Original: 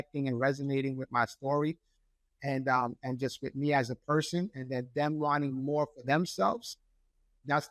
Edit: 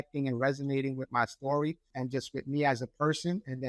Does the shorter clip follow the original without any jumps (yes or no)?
no